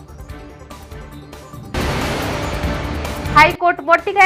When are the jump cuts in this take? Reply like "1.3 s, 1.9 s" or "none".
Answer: none